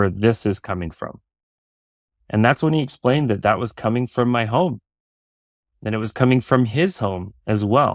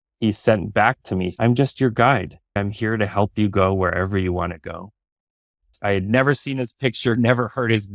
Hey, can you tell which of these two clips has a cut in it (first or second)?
second